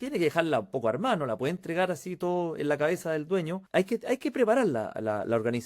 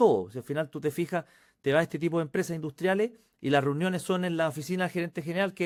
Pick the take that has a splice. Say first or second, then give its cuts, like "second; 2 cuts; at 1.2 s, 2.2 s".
first; 1 cut; at 3.6 s